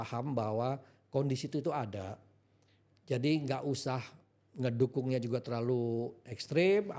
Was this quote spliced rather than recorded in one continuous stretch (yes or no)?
no